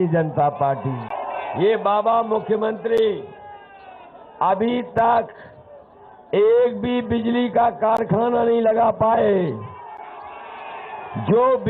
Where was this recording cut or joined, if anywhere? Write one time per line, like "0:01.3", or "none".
0:01.1

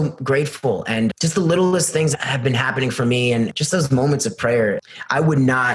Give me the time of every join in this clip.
0:01.1
0:02.1
0:03.5
0:04.8

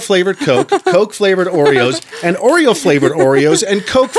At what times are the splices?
none

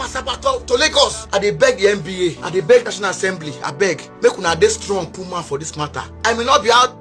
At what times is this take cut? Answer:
0:01.2
0:02.4
0:04.1
0:06.2

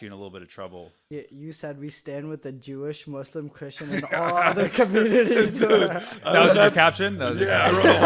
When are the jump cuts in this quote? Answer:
0:00.9

